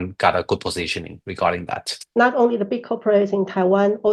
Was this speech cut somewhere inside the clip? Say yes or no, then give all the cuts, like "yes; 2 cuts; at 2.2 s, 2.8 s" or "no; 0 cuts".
yes; 1 cut; at 2.1 s